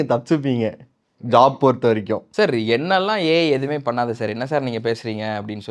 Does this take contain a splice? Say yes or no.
yes